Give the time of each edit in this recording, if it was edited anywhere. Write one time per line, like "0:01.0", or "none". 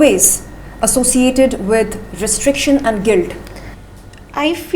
none